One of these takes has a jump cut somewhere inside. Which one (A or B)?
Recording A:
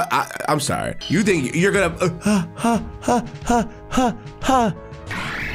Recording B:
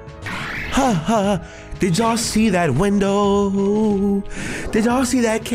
A